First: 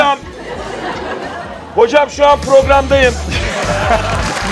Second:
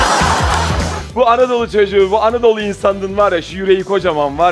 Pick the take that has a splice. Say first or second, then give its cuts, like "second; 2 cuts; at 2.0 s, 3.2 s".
second; 1 cut; at 1.0 s